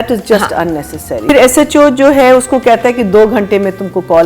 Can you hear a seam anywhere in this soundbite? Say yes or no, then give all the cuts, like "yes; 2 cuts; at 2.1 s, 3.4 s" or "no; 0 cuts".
yes; 1 cut; at 1.3 s